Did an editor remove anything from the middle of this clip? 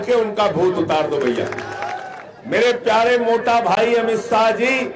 yes; 1 cut; at 1.9 s

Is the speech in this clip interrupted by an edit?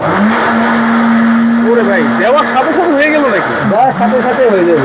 no; 0 cuts

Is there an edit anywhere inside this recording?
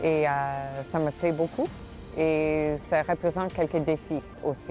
no; 0 cuts

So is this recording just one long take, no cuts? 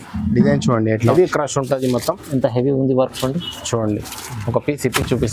no; 1 cut; at 1.1 s

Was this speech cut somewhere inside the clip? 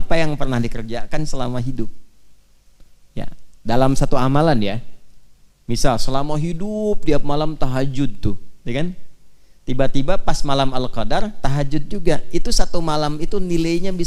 no; 0 cuts

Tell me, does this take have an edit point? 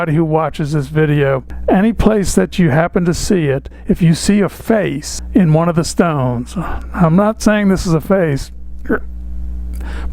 no; 0 cuts

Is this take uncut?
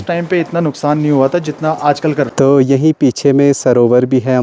no; 1 cut; at 2.3 s

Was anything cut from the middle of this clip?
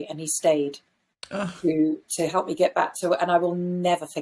no; 0 cuts

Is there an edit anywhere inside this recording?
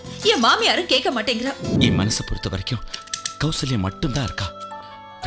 yes; 1 cut; at 1.7 s

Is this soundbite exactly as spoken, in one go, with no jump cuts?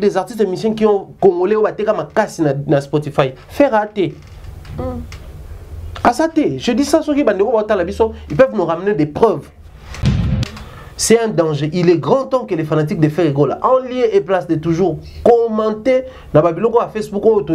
no; 1 cut; at 10.2 s

